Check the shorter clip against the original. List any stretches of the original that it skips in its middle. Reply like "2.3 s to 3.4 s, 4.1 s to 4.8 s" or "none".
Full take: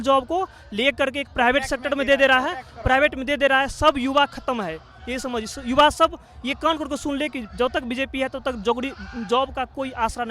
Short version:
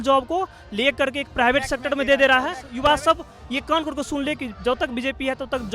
2.6 s to 5.6 s